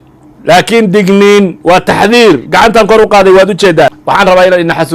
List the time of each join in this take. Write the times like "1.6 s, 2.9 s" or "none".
4.0 s